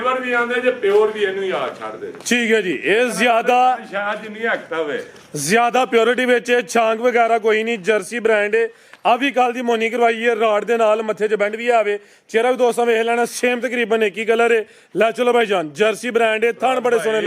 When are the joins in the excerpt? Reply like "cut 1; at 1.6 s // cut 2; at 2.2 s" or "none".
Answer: none